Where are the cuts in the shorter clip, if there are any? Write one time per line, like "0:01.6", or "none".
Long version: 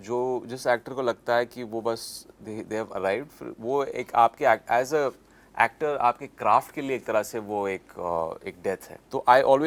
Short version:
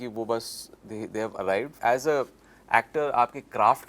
0:01.8